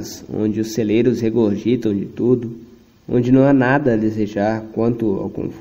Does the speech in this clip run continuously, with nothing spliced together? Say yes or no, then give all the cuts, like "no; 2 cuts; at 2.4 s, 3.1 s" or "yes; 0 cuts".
yes; 0 cuts